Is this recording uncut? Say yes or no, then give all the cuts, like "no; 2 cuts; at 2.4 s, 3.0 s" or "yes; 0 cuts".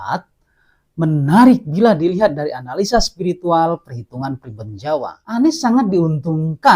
no; 1 cut; at 5.2 s